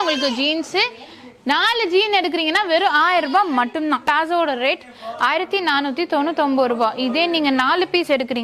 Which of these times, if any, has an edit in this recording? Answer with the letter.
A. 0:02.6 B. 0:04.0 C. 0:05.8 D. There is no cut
B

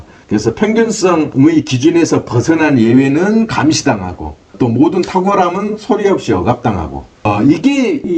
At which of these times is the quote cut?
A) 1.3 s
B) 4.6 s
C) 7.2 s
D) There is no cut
A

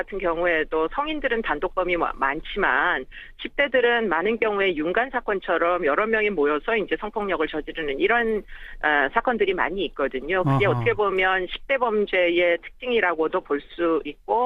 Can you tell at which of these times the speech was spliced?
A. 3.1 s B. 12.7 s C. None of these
A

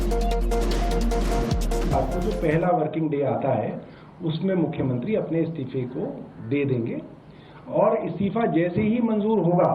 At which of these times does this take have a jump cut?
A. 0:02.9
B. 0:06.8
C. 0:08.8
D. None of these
A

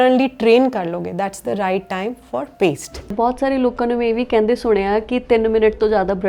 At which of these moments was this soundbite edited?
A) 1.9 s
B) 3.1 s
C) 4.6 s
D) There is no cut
B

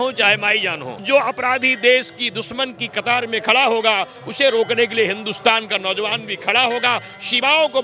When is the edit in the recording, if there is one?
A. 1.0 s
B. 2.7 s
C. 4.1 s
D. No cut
A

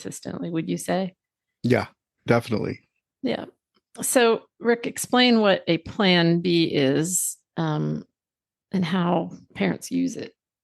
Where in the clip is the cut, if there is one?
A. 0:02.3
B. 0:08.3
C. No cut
A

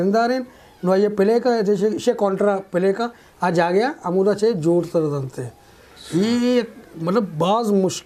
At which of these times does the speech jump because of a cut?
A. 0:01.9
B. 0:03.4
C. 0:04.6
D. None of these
D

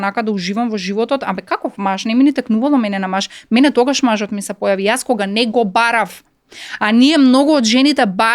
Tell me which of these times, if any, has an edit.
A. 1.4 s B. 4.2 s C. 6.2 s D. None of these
D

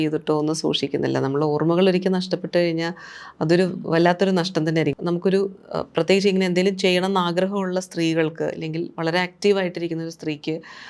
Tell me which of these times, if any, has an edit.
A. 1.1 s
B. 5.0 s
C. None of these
B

